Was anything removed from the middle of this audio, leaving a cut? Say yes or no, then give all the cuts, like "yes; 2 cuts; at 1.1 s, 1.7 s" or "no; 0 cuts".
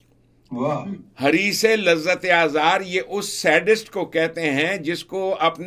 no; 0 cuts